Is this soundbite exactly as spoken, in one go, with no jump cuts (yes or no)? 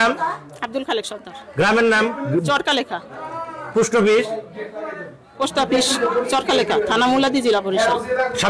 yes